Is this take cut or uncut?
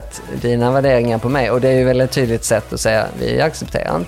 uncut